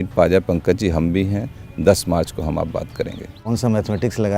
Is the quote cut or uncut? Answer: cut